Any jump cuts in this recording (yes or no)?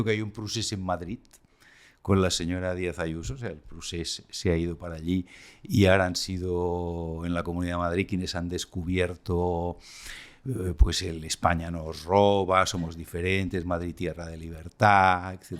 no